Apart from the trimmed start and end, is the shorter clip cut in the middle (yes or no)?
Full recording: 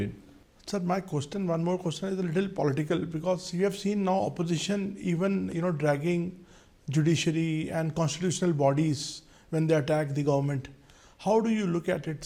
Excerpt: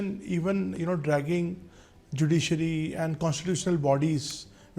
no